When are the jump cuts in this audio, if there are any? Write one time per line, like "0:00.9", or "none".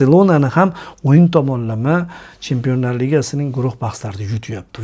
none